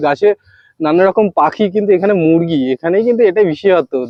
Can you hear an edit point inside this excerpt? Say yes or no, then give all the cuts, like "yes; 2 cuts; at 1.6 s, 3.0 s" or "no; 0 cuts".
no; 0 cuts